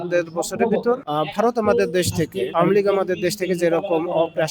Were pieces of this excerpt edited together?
yes; 2 cuts; at 1.1 s, 2.4 s

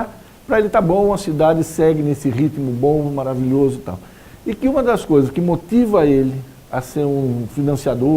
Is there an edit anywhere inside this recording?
yes; 1 cut; at 6.2 s

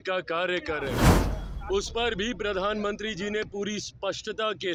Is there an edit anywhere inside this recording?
no; 0 cuts

